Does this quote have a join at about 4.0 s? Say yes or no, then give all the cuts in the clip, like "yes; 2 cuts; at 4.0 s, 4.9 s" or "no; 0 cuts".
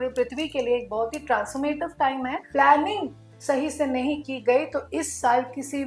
no; 1 cut; at 2.5 s